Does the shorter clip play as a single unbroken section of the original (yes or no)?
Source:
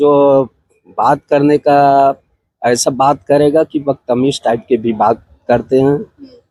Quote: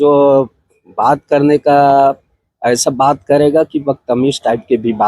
yes